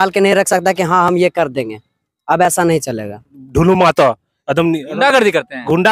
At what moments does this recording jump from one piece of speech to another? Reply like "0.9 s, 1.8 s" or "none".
3.4 s